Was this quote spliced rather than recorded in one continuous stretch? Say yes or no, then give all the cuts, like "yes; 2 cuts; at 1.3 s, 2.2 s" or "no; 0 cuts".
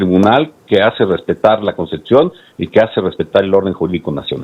no; 0 cuts